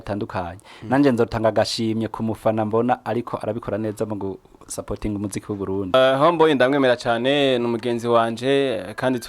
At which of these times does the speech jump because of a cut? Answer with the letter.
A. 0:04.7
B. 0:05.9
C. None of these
B